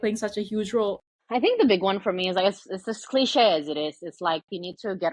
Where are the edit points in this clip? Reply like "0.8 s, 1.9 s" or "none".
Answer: 1.1 s